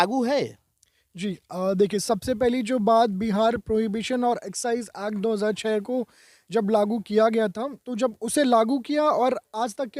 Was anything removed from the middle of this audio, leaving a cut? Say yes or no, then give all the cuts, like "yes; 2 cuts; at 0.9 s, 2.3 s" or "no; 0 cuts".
no; 0 cuts